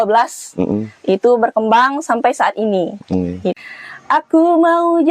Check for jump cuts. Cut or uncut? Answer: cut